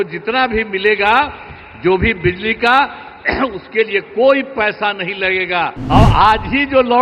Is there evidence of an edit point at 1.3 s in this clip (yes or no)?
no